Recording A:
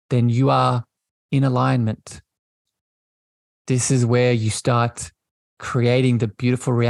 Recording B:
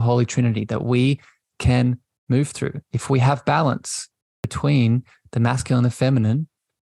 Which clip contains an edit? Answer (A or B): B